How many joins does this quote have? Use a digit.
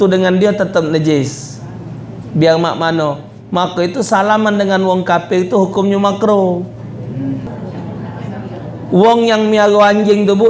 1